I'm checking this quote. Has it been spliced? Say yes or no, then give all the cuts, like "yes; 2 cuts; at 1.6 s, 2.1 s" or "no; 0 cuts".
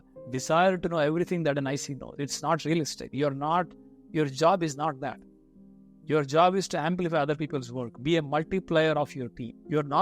yes; 1 cut; at 9.0 s